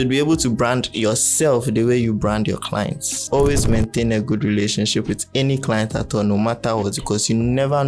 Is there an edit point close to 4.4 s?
no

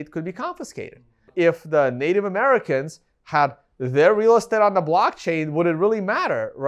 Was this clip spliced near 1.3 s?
yes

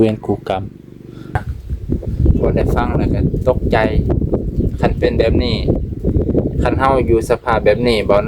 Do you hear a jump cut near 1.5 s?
yes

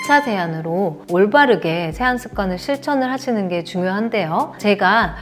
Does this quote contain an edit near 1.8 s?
no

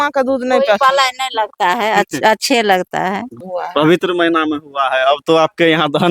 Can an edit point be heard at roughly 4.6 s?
no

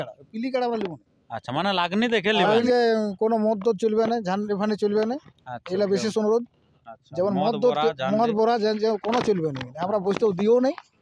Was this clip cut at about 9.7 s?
no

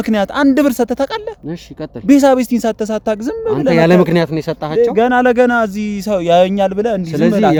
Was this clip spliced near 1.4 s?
no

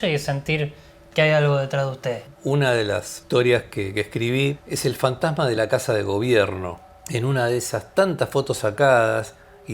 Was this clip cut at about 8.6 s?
no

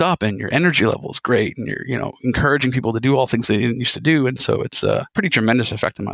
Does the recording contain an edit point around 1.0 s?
no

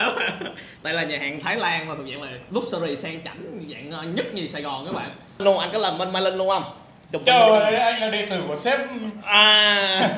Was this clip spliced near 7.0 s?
no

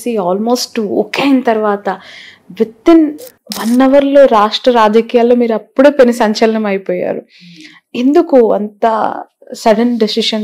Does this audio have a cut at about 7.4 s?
no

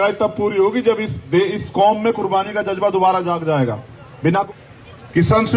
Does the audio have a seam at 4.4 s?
yes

